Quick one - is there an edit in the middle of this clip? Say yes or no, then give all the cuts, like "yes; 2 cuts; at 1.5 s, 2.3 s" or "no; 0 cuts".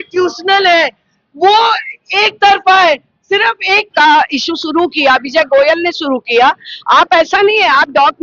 yes; 1 cut; at 3.8 s